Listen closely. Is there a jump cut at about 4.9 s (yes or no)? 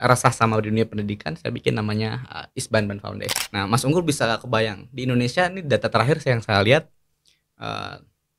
no